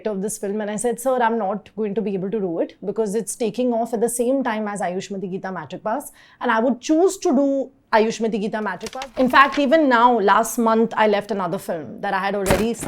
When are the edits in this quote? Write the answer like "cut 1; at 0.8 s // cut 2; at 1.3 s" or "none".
cut 1; at 8.8 s